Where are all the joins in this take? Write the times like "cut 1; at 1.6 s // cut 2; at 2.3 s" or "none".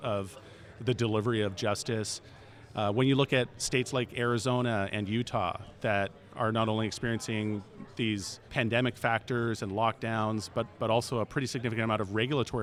none

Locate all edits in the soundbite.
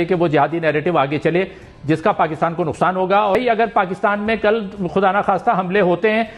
cut 1; at 3.4 s

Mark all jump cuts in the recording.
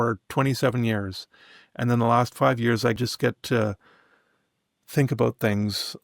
cut 1; at 3.0 s

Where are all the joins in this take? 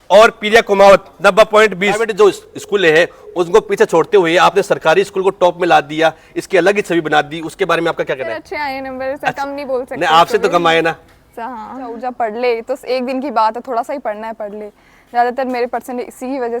cut 1; at 2.1 s // cut 2; at 8.5 s // cut 3; at 12.0 s

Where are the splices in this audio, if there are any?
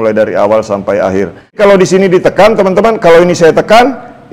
cut 1; at 1.6 s

